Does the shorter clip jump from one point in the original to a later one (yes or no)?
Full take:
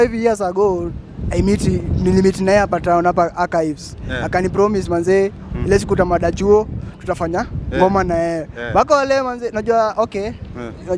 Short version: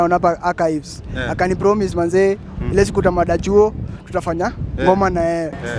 no